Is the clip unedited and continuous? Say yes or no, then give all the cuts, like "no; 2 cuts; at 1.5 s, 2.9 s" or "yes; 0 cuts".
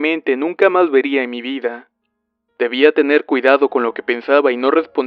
yes; 0 cuts